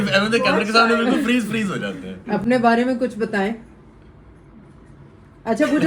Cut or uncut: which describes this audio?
uncut